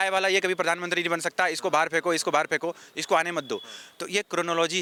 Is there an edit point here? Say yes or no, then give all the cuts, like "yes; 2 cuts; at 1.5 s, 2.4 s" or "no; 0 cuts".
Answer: no; 0 cuts